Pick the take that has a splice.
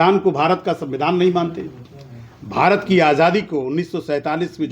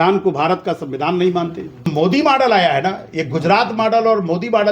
second; 1 cut; at 1.9 s

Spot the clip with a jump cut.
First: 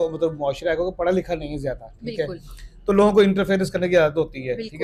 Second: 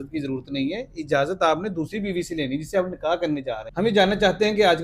second; 1 cut; at 3.7 s

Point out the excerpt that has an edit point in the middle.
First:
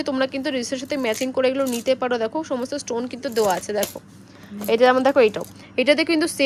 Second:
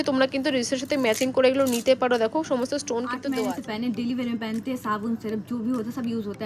second; 1 cut; at 3.2 s

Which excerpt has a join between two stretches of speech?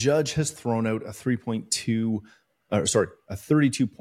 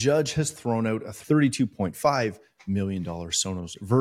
second; 1 cut; at 1.1 s

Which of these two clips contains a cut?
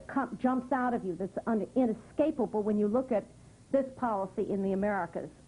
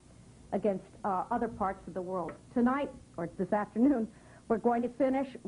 second; 1 cut; at 1.1 s

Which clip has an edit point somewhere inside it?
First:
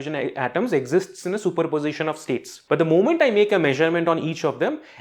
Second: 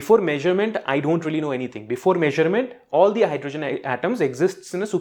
first; 1 cut; at 2.5 s

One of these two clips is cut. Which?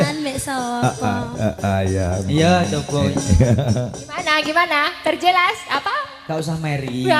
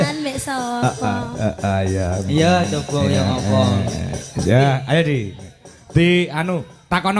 first; 1 cut; at 3.1 s

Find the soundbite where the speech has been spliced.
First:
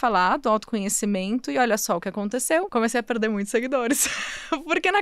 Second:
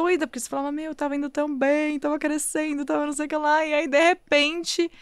first; 1 cut; at 2.7 s

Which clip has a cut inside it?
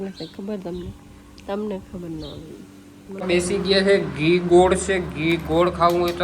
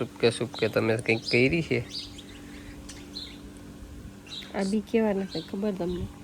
first; 1 cut; at 3.2 s

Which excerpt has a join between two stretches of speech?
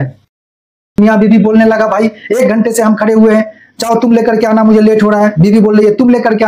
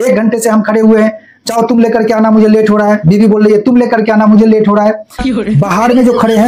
first; 1 cut; at 1.0 s

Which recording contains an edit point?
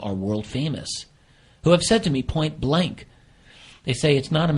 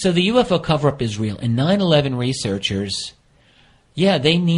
first; 1 cut; at 2.8 s

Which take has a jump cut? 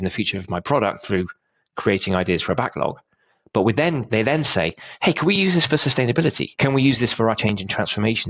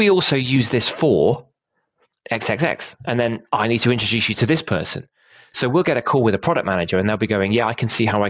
first; 2 cuts; at 6.5 s, 7.4 s

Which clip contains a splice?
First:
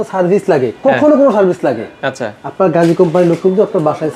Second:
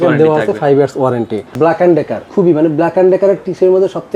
second; 2 cuts; at 1.5 s, 2.3 s

